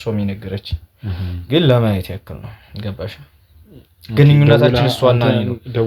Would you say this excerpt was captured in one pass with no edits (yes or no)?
yes